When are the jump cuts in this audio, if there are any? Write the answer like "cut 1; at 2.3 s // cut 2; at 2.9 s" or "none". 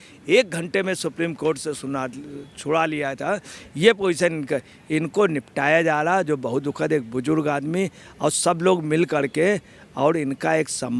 none

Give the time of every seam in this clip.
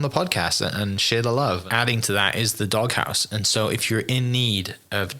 cut 1; at 1.6 s

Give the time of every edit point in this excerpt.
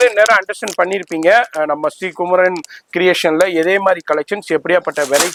none

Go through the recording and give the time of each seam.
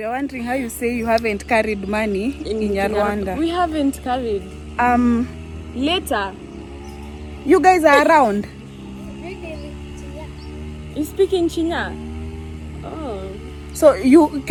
none

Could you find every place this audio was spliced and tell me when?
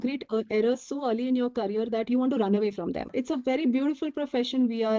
cut 1; at 3.1 s

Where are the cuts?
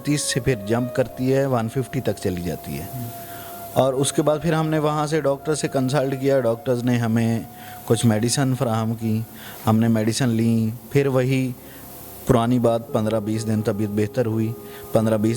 none

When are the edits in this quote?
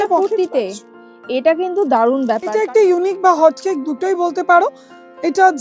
cut 1; at 2.5 s

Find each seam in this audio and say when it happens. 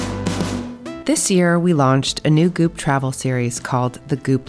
cut 1; at 1.0 s

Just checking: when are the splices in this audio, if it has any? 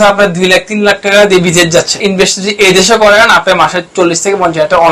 cut 1; at 2.0 s

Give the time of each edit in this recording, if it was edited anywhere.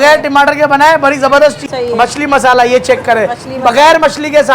cut 1; at 1.6 s

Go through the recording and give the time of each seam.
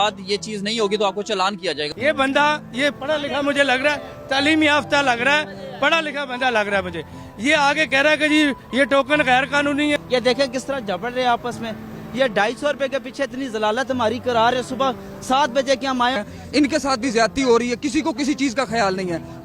cut 1; at 1.9 s // cut 2; at 10.0 s // cut 3; at 16.2 s

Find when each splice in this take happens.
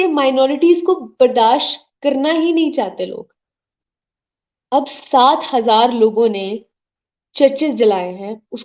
none

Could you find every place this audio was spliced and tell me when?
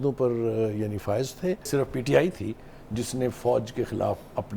cut 1; at 1.7 s

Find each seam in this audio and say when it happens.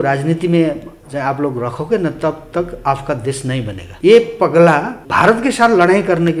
cut 1; at 0.9 s // cut 2; at 3.8 s // cut 3; at 5.0 s

